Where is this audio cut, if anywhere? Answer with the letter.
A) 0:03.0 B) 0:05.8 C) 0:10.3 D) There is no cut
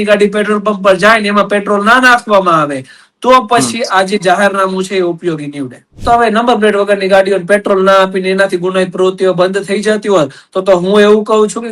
B